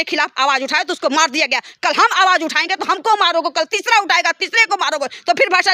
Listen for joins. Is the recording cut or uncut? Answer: uncut